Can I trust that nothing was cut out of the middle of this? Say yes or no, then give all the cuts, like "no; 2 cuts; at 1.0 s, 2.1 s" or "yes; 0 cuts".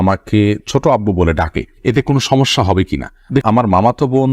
no; 1 cut; at 3.4 s